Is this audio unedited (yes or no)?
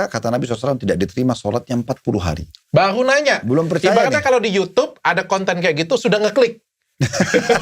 no